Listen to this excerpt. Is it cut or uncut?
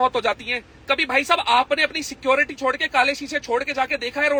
uncut